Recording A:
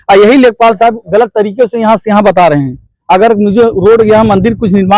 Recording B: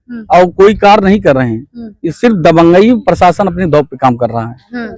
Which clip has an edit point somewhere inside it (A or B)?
A